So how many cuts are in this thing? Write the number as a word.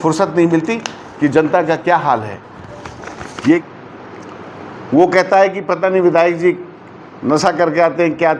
one